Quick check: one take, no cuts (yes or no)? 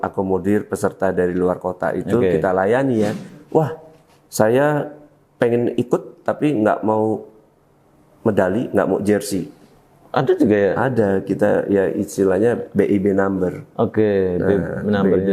no